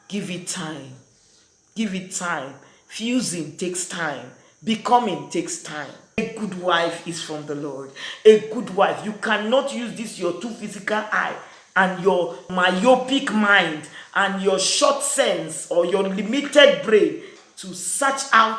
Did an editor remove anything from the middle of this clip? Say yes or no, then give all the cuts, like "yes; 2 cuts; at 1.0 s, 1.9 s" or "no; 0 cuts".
yes; 2 cuts; at 6.2 s, 12.5 s